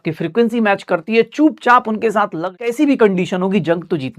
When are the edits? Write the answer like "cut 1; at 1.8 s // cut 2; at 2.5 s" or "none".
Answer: cut 1; at 2.7 s